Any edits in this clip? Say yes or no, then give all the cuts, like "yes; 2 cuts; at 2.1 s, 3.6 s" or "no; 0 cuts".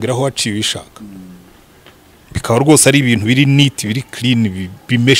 no; 0 cuts